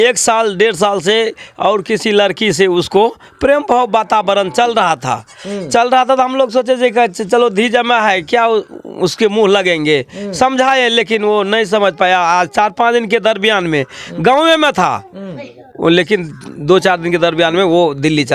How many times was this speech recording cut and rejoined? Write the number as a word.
zero